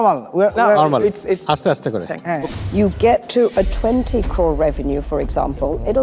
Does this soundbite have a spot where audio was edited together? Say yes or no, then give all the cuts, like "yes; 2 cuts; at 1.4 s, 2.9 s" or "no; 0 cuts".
yes; 1 cut; at 2.6 s